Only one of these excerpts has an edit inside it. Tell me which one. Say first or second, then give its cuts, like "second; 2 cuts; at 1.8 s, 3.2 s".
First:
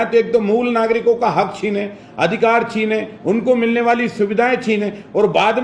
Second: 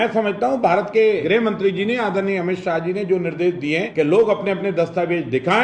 second; 2 cuts; at 1.2 s, 3.9 s